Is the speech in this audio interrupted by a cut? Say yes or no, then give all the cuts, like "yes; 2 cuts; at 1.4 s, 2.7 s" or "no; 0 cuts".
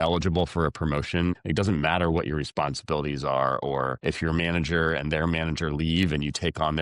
yes; 2 cuts; at 1.4 s, 4.0 s